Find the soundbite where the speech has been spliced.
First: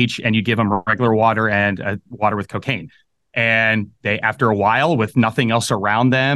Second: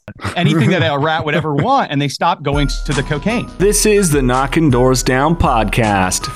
second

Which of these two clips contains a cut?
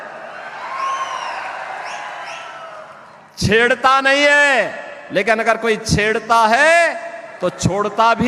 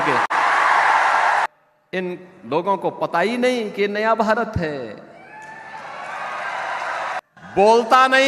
second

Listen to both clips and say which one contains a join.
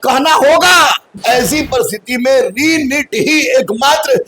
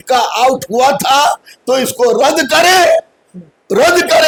first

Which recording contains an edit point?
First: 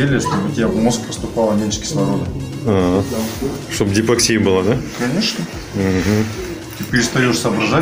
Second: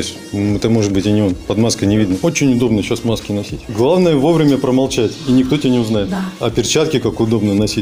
second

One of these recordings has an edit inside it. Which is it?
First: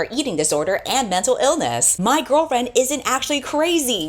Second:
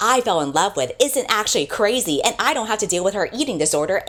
first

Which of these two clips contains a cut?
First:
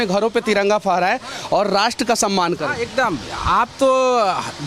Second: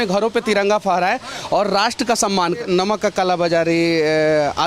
second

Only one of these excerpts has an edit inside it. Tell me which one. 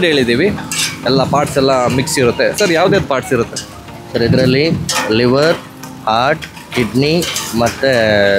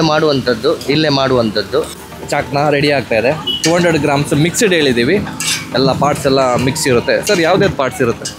second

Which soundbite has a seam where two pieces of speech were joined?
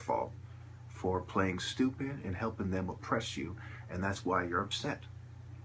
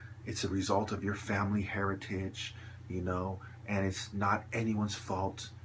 second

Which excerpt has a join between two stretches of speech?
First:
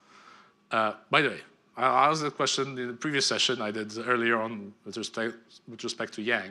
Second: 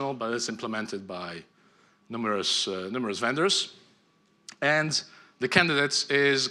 first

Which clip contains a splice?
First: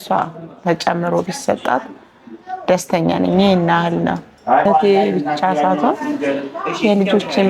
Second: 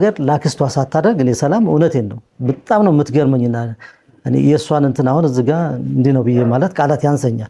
first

